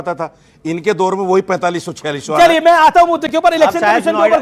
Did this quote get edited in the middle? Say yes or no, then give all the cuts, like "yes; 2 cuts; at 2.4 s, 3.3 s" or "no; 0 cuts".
no; 0 cuts